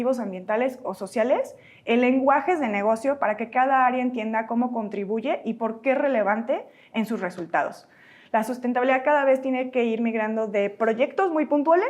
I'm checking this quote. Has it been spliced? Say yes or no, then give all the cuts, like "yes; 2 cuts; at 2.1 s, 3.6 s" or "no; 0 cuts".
no; 0 cuts